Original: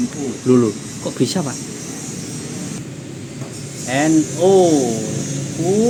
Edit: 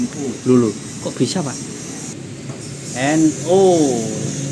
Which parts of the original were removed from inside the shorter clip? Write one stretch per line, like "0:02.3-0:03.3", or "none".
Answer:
0:02.1-0:03.0

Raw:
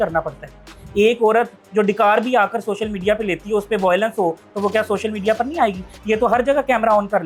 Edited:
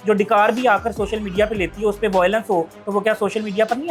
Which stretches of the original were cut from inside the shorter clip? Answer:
none

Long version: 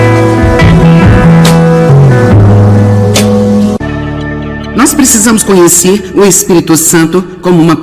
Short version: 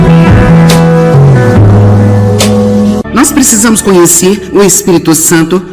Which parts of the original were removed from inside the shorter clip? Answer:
0:03.8-0:04.7

